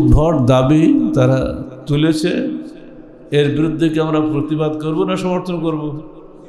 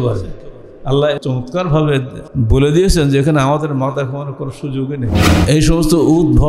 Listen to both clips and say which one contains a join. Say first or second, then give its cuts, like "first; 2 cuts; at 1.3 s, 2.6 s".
second; 3 cuts; at 1.2 s, 2.2 s, 5.3 s